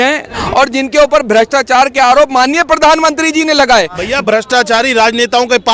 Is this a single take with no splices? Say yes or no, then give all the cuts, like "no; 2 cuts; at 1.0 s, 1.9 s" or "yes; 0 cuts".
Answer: no; 1 cut; at 4.0 s